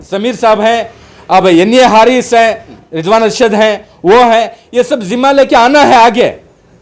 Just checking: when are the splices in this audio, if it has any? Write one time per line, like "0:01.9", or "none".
0:02.8